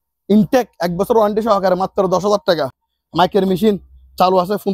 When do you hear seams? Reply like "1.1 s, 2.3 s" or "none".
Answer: none